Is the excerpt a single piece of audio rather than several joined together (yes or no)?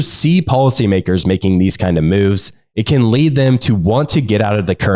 yes